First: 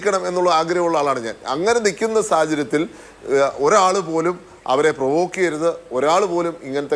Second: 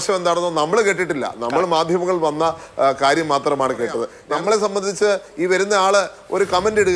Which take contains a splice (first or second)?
second